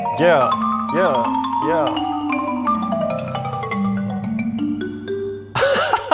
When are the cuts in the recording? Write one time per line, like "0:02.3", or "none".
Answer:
none

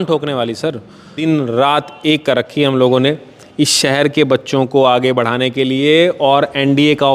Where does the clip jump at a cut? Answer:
0:01.1

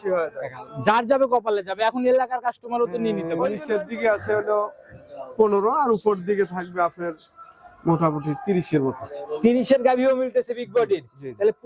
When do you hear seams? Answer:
0:03.6

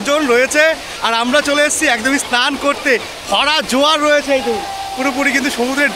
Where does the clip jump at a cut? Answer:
none

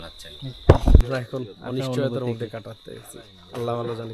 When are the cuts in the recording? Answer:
0:01.0

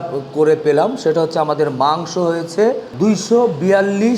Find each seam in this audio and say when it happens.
0:02.9

